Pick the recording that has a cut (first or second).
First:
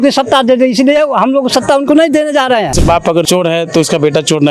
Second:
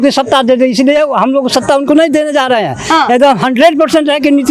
first